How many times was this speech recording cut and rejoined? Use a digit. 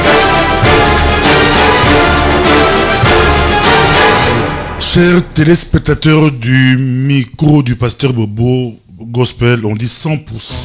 0